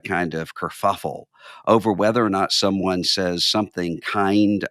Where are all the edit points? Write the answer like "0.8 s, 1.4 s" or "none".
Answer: none

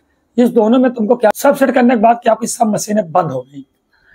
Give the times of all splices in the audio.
1.3 s

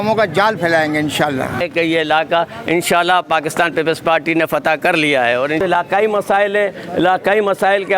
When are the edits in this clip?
1.6 s, 5.6 s

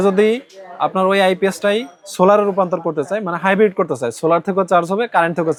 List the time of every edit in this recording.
none

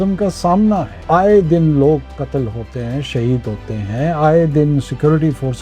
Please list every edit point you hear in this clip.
0.9 s

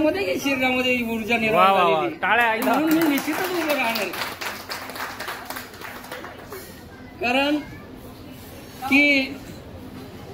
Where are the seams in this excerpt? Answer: none

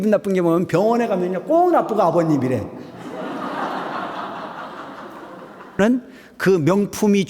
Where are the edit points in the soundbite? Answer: 5.8 s

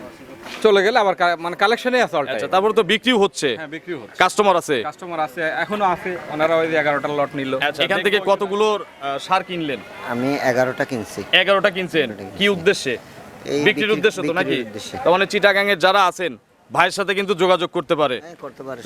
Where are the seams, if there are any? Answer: 7.8 s

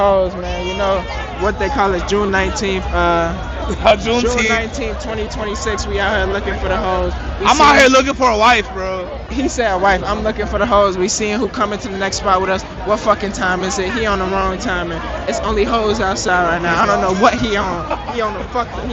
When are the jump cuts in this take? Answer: none

